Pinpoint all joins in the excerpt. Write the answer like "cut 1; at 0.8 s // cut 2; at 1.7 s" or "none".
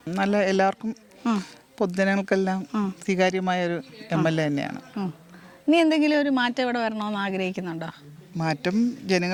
none